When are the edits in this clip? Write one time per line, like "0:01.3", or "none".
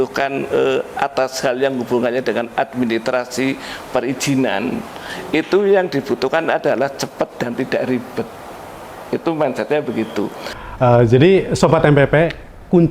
0:10.5